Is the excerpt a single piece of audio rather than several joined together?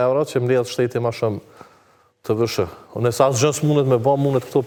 yes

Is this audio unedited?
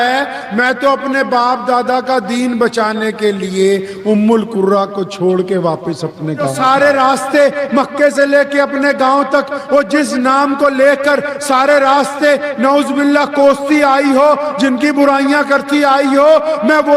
no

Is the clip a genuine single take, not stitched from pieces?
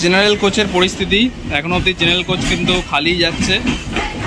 yes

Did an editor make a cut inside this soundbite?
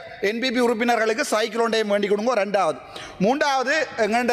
no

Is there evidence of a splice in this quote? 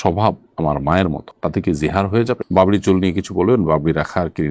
yes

